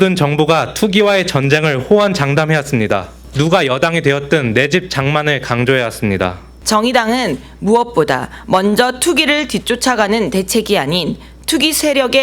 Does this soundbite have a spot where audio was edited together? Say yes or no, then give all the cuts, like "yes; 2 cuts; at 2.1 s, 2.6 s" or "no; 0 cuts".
yes; 2 cuts; at 3.2 s, 6.5 s